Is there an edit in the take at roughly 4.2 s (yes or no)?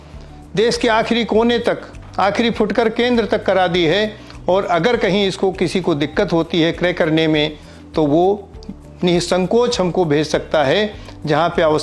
no